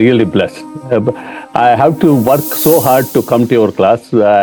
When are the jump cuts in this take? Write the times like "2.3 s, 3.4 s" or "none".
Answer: none